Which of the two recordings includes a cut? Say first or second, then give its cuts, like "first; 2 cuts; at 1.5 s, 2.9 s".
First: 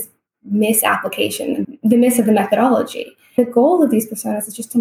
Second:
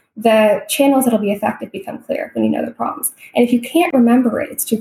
first; 2 cuts; at 1.6 s, 3.4 s